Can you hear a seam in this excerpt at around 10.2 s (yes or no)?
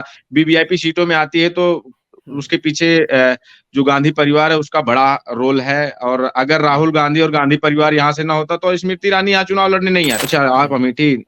yes